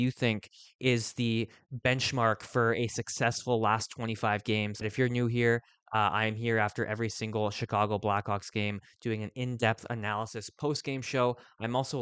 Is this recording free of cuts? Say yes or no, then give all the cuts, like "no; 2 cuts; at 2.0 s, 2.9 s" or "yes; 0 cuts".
no; 1 cut; at 4.8 s